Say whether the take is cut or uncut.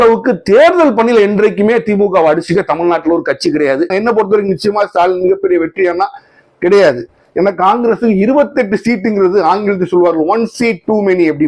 cut